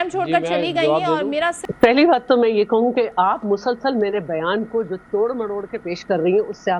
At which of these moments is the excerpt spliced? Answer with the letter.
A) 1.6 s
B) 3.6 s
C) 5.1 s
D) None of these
A